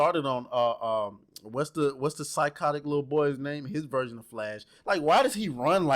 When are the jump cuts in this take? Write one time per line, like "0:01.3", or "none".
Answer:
none